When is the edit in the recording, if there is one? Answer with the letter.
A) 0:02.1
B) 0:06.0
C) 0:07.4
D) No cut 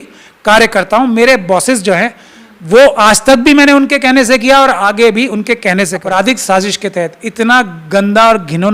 B